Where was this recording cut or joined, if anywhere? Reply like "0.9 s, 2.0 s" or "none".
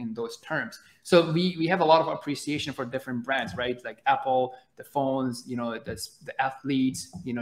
none